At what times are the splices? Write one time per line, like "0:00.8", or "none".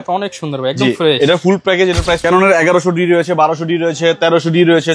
0:02.2